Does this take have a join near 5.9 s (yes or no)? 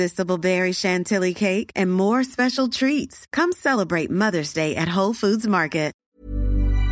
yes